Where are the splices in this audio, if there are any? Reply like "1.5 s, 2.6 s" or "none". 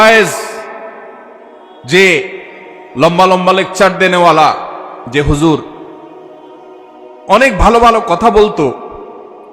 5.8 s, 7.2 s